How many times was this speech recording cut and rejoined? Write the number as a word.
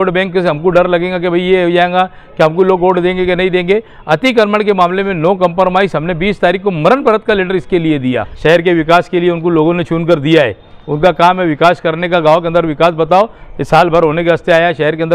one